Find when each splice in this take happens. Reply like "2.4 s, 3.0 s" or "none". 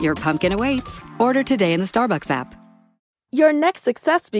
3.2 s